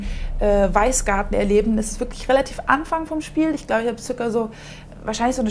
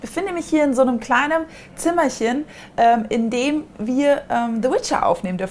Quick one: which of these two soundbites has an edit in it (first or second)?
first